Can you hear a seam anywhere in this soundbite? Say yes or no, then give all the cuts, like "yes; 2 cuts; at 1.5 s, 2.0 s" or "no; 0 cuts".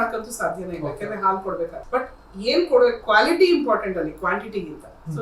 yes; 1 cut; at 1.8 s